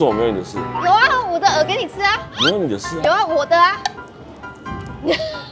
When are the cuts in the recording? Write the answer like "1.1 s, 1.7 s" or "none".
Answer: none